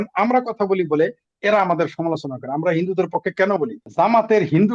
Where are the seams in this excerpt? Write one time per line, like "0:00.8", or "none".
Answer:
0:03.8